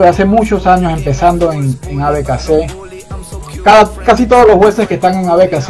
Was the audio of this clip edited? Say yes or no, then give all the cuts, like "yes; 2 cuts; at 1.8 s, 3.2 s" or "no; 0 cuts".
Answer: no; 0 cuts